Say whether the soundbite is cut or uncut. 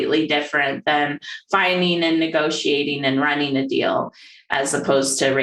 uncut